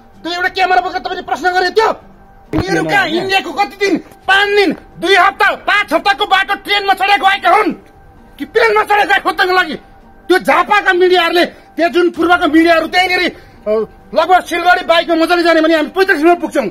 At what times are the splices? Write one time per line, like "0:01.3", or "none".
0:02.5

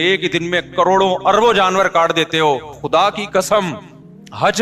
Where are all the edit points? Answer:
0:02.8

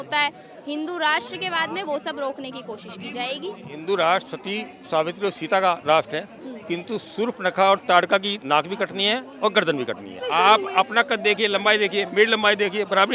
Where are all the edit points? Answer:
0:03.7
0:10.2

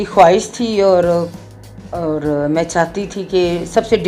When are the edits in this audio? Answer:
none

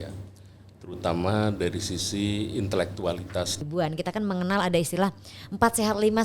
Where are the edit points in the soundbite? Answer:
0:03.6

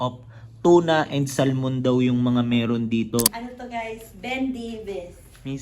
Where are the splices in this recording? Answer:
0:03.4

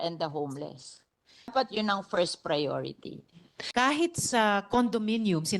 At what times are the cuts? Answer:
0:01.5
0:03.6

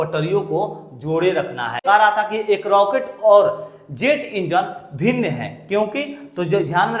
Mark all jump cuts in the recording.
0:01.8

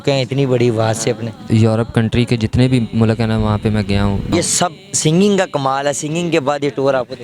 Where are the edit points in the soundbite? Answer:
0:01.4
0:04.3

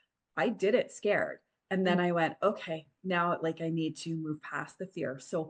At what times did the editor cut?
none

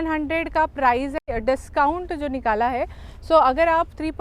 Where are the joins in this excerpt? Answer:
0:01.2

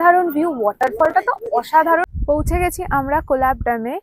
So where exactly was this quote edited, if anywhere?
0:02.1

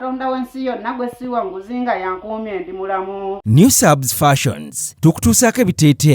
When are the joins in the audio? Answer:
0:03.4

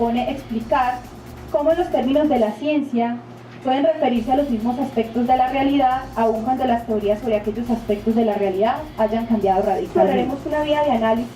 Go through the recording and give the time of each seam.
0:09.9

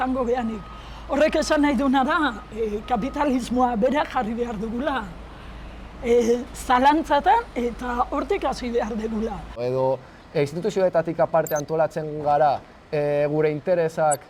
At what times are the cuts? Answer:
none

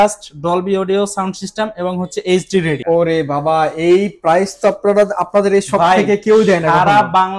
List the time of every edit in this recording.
0:02.8

